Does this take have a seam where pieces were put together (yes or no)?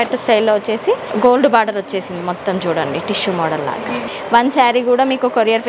yes